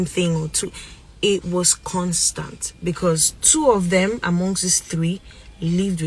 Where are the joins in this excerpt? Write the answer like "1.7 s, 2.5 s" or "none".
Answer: none

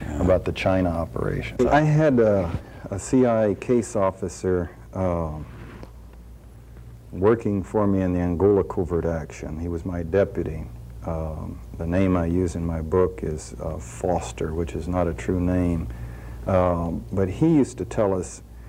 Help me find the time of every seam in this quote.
1.6 s

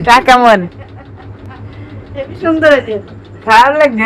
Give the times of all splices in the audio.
none

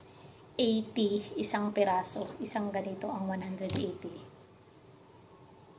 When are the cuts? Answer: none

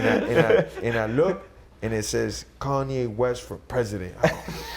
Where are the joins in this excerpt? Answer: none

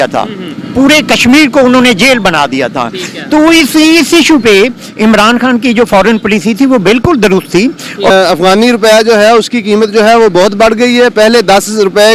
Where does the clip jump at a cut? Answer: 8.1 s

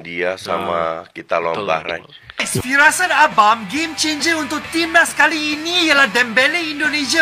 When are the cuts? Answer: 2.5 s

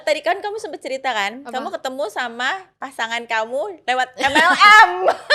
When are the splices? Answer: none

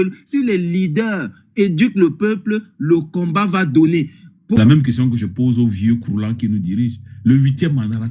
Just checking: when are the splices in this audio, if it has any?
4.6 s

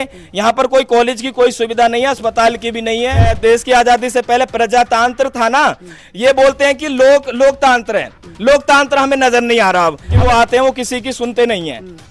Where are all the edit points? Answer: 3.3 s, 10.1 s

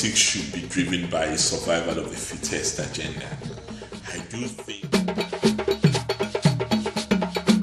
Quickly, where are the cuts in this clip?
4.7 s

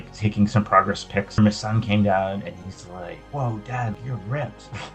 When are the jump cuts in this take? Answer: 1.3 s, 3.2 s, 4.0 s

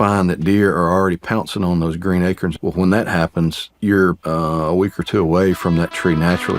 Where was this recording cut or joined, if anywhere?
2.5 s, 3.7 s, 4.2 s

